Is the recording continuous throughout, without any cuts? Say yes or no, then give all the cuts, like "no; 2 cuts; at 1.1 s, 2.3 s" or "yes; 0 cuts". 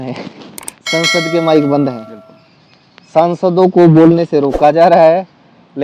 yes; 0 cuts